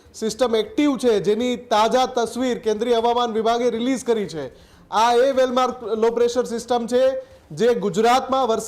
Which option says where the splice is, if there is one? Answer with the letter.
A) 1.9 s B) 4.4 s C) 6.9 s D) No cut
D